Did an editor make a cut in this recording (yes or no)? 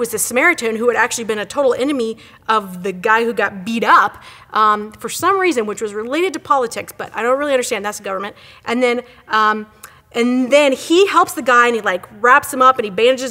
no